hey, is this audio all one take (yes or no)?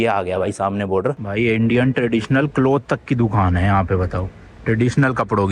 no